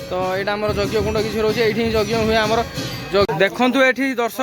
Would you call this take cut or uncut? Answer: cut